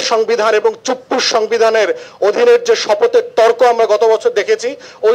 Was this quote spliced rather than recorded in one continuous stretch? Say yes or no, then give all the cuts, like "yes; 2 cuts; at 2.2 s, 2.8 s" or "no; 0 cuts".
no; 0 cuts